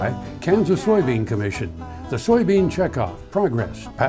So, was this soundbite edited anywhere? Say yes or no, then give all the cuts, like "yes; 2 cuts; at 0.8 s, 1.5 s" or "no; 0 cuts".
no; 0 cuts